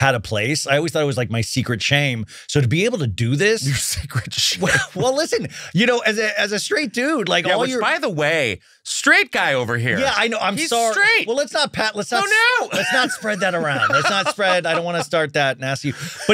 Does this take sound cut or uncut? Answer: uncut